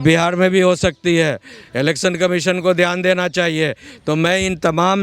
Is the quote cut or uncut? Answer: uncut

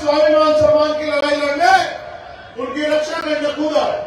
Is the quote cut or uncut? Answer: uncut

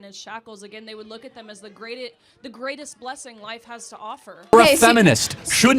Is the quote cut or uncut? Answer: cut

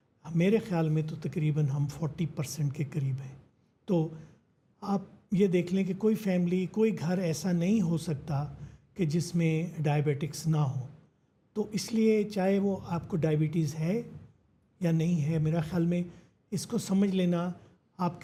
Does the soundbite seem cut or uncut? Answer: uncut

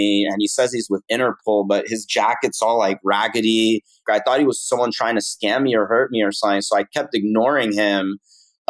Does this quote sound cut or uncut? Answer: cut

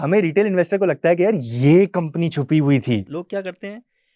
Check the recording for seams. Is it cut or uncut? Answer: cut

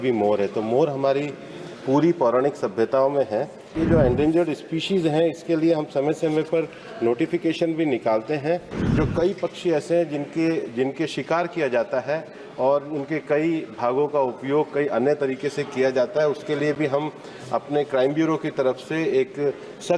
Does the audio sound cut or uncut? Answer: cut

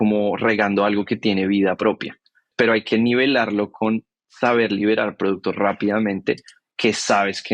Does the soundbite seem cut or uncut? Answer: cut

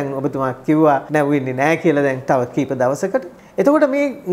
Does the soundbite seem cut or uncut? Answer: cut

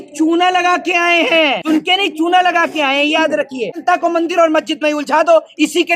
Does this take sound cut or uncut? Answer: cut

